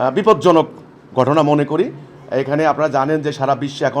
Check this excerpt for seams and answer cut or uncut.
uncut